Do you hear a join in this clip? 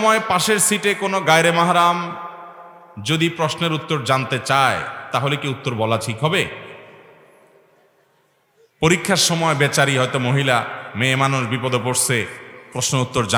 no; 0 cuts

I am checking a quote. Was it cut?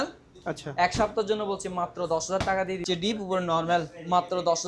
yes; 1 cut; at 2.8 s

